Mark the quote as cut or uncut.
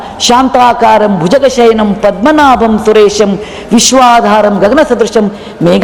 uncut